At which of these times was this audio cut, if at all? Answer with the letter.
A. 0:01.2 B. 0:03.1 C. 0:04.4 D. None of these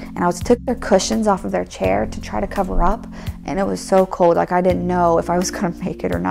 D